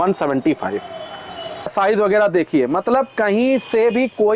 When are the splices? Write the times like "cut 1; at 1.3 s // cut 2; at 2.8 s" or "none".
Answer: cut 1; at 1.7 s